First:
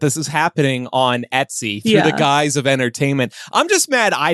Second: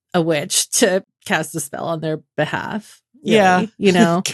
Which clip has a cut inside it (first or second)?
second